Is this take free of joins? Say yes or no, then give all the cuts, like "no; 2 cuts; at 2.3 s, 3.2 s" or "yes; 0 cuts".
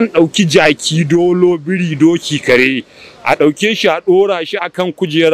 yes; 0 cuts